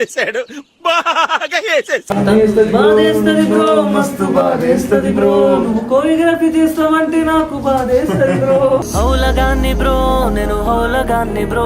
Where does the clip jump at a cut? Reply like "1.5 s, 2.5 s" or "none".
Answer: 2.1 s

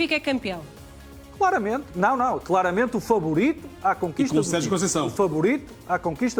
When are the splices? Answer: none

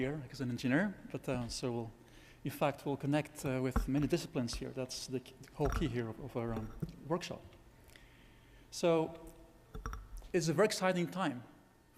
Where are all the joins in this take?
10.7 s

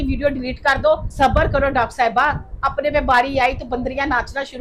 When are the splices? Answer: 1.1 s

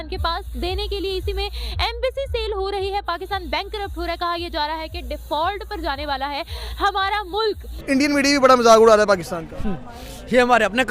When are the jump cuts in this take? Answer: 7.8 s

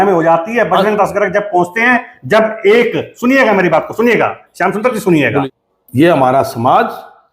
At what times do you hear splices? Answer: 5.3 s

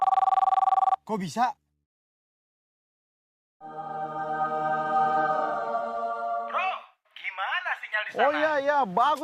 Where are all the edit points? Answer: 1.0 s

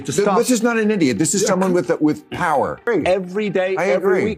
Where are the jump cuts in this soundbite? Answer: 2.9 s

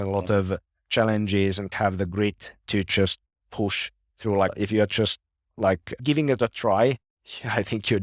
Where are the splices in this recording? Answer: 1.7 s, 4.5 s, 6.0 s

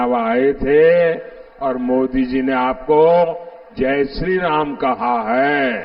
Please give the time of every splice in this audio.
none

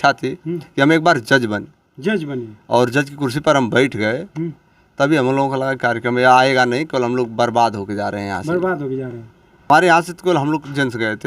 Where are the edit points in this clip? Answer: 9.7 s

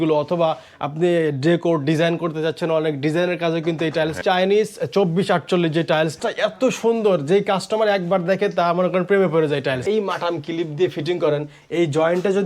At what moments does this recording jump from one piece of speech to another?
4.2 s, 6.1 s, 9.8 s

